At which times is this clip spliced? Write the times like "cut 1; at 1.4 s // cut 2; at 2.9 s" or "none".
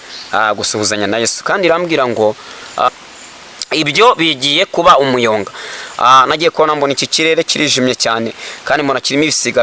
cut 1; at 2.9 s